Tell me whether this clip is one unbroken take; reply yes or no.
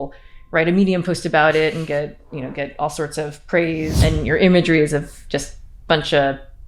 no